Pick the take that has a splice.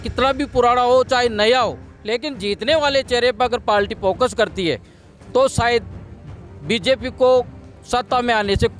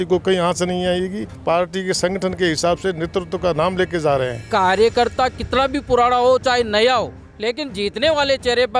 second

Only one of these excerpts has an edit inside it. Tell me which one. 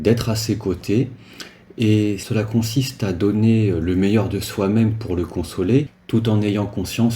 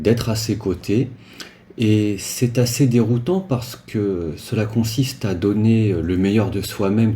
first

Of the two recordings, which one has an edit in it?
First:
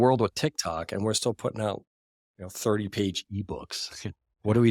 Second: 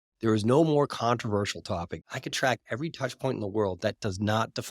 second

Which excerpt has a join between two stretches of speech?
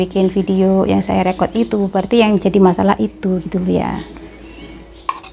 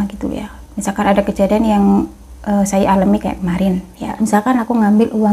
second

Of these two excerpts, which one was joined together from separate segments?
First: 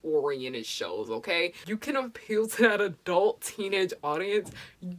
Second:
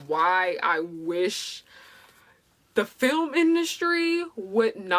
first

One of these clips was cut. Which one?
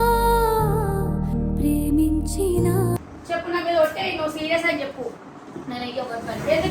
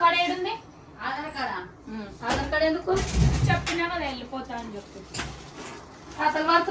first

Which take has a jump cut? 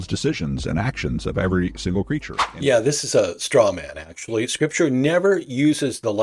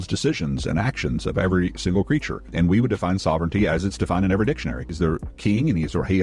second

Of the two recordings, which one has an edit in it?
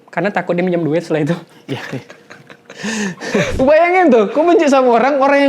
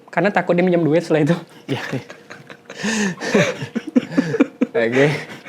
first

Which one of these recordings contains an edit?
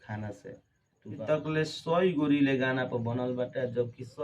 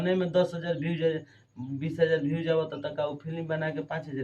first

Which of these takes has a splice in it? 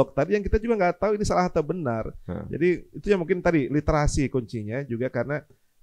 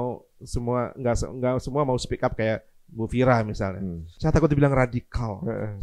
second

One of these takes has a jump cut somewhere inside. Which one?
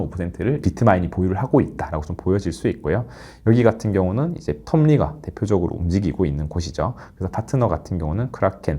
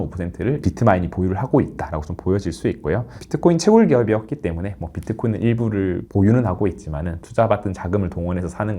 second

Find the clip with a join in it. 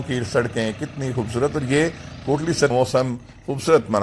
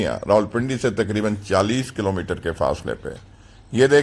first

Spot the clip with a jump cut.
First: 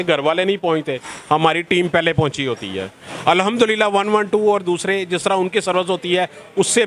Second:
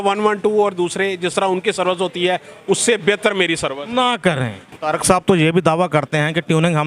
second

